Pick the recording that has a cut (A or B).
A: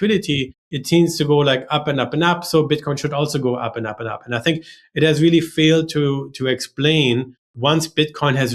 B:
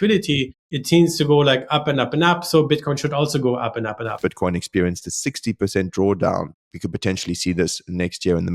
B